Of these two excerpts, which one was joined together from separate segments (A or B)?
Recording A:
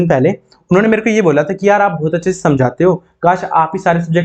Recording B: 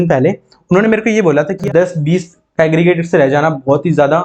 B